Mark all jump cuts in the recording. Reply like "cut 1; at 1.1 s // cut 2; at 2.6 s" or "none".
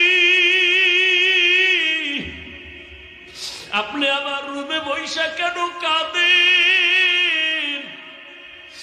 none